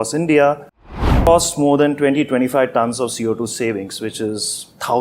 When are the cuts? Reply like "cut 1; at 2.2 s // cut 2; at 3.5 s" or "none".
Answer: cut 1; at 1.1 s